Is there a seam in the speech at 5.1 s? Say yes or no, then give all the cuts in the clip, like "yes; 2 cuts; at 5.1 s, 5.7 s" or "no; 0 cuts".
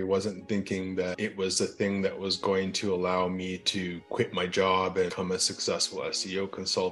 yes; 2 cuts; at 1.2 s, 5.1 s